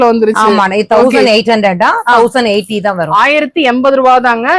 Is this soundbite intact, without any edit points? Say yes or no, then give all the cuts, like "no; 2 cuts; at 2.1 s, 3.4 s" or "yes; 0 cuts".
yes; 0 cuts